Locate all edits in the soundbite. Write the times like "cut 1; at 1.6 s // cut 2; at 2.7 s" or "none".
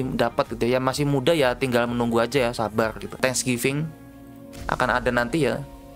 cut 1; at 3.2 s